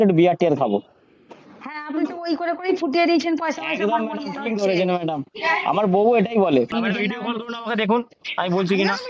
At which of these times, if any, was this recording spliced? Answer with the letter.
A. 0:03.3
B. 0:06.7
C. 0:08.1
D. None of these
B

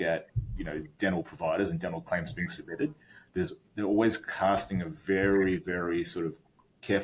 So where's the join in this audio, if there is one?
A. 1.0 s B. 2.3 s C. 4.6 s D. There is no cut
D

